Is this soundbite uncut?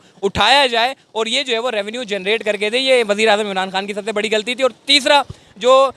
yes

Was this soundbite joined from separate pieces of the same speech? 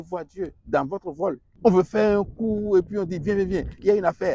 yes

